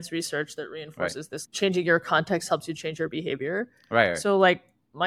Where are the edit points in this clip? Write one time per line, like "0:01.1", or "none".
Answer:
none